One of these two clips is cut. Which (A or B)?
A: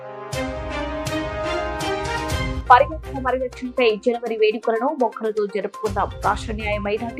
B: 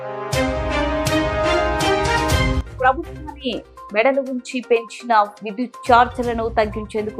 B